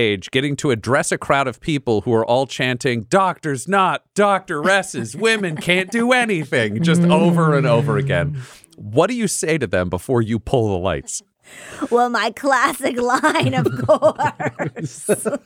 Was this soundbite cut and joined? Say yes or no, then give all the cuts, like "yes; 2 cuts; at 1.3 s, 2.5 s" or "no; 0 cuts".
no; 0 cuts